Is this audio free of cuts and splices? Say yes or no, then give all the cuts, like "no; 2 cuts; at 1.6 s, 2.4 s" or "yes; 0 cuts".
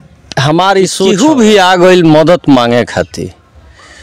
no; 1 cut; at 1.1 s